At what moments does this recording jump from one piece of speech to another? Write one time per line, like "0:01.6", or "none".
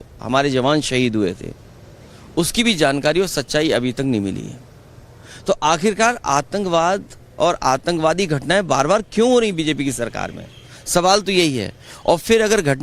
none